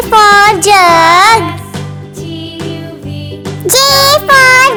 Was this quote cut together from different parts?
no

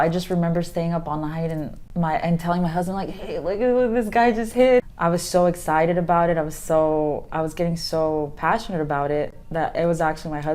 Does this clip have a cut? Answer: yes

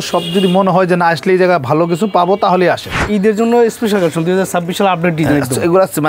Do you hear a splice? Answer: yes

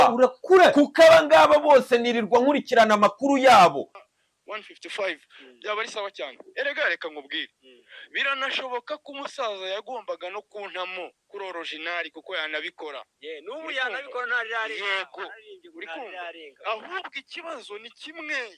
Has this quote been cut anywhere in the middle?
yes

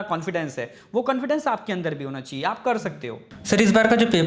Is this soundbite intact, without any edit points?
no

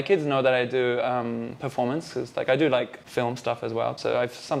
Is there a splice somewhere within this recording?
no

